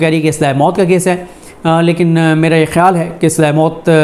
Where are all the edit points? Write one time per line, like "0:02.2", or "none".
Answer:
none

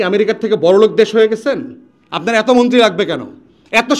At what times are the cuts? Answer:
none

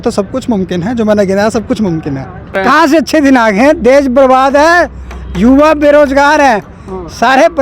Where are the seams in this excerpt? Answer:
0:02.6

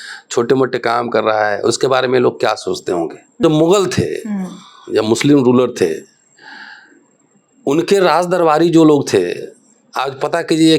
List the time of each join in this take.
0:03.4

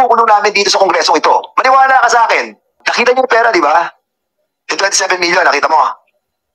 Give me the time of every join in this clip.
0:02.8

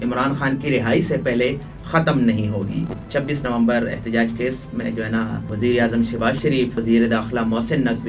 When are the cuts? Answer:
0:03.0
0:05.5
0:06.8

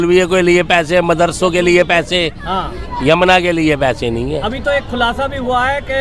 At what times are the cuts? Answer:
none

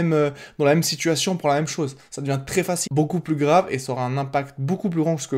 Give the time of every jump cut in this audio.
0:02.8

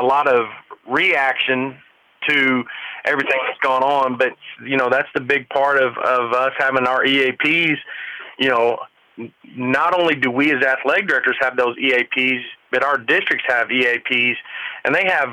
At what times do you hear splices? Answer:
none

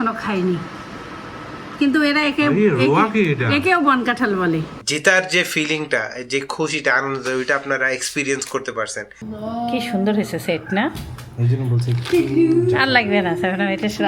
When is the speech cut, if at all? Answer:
0:04.8
0:09.2

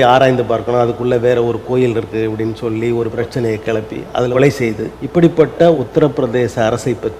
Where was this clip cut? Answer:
0:03.1
0:04.3
0:04.9
0:05.8

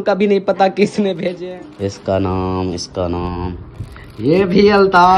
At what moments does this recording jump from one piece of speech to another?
0:01.4

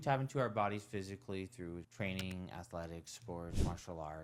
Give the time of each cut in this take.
none

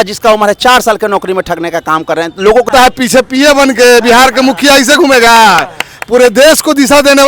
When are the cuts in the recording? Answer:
0:02.7

